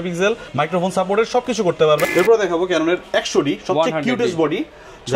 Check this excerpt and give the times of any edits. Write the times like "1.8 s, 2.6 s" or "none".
2.1 s